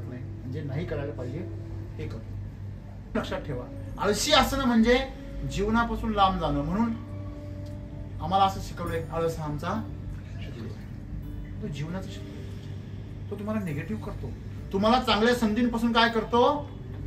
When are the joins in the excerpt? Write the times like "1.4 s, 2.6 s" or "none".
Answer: 3.1 s